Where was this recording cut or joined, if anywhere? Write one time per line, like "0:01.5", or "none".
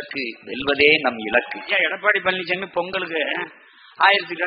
0:01.6